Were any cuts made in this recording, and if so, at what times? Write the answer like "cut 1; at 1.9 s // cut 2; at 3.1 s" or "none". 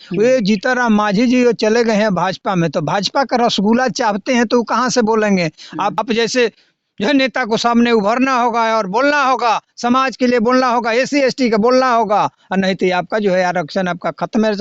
cut 1; at 6.0 s

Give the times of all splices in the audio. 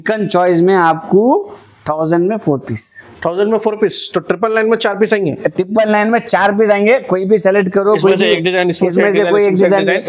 none

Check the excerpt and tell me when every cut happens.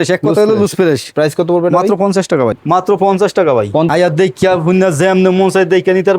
cut 1; at 2.5 s // cut 2; at 3.9 s

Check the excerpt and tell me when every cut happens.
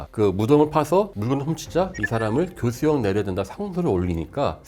none

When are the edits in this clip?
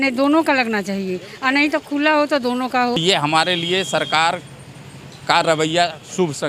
cut 1; at 3.0 s

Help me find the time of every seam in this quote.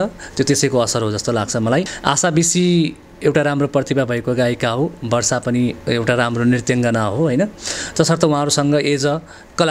cut 1; at 1.9 s

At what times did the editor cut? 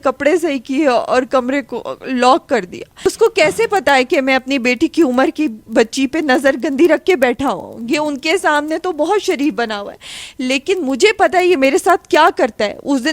cut 1; at 3.0 s

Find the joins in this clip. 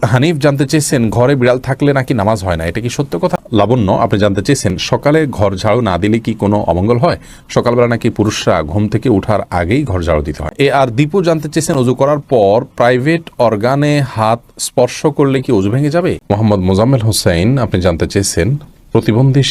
cut 1; at 3.4 s // cut 2; at 10.5 s // cut 3; at 16.2 s

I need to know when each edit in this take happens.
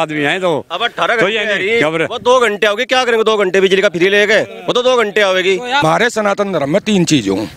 cut 1; at 5.8 s

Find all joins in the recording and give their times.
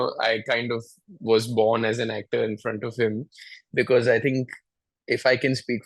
none

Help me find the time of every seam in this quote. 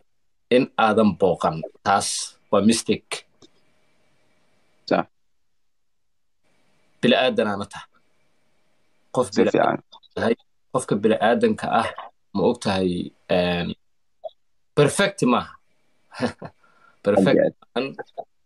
none

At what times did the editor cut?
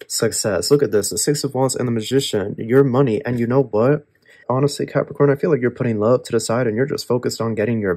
cut 1; at 4.5 s

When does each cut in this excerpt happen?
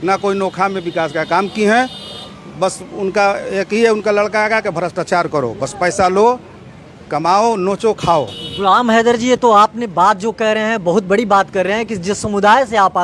none

